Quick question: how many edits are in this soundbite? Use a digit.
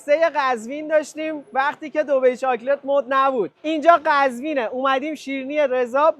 1